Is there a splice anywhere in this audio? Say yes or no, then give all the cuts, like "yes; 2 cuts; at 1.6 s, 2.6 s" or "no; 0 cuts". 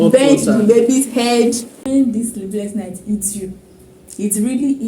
yes; 1 cut; at 1.7 s